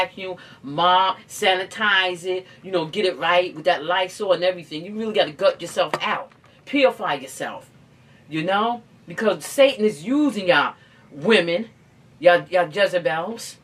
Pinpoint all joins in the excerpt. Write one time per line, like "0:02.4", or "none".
none